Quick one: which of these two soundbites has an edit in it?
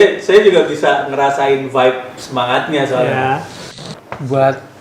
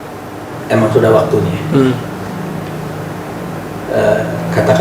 first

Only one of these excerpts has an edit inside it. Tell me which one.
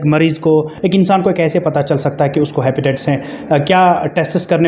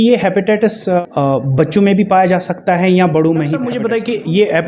second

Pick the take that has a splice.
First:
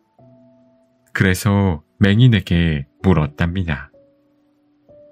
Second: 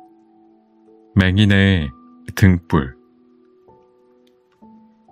second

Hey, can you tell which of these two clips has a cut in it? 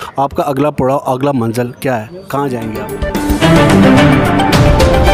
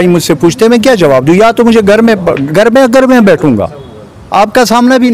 first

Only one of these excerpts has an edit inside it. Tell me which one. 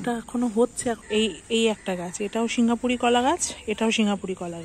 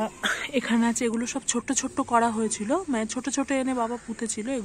first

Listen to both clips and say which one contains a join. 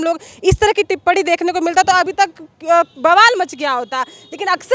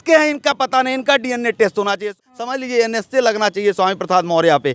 second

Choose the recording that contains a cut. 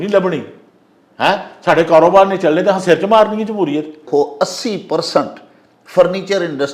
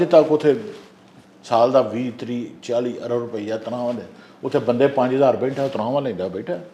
first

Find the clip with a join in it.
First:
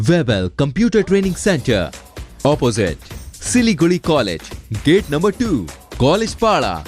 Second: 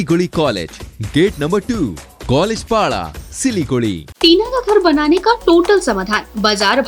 second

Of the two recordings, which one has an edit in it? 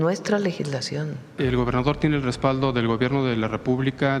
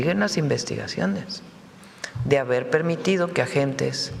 first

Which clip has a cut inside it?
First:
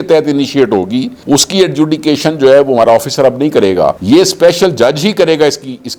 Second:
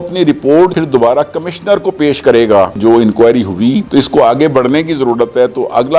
second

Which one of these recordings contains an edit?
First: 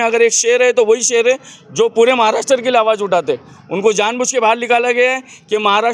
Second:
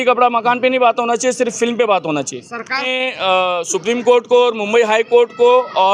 second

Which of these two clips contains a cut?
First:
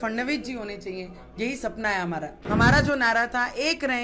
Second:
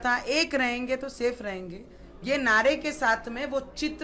first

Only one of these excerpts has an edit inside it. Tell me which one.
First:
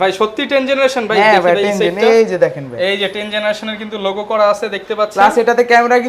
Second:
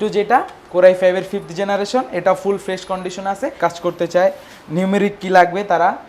second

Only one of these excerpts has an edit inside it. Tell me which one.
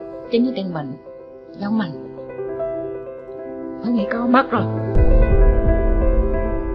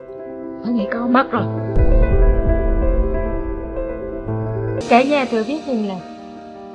second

